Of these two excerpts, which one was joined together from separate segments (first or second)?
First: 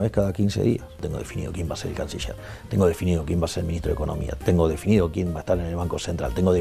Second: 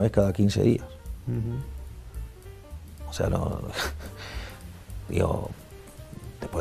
first